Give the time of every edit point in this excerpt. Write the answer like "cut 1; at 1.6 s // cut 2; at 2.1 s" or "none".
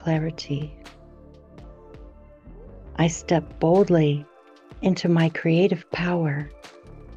cut 1; at 0.7 s // cut 2; at 2.9 s